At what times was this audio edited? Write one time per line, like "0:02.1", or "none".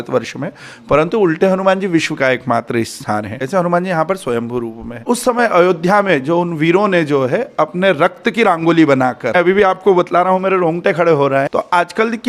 0:03.4
0:05.0
0:09.3
0:11.5